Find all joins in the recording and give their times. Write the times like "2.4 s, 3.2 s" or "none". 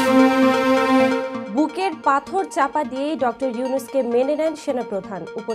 1.3 s